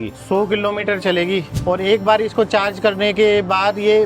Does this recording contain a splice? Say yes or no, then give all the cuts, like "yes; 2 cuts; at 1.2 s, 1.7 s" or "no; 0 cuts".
yes; 1 cut; at 1.6 s